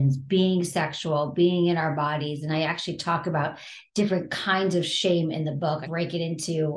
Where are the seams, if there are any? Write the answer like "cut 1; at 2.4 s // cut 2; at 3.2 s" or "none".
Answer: cut 1; at 5.9 s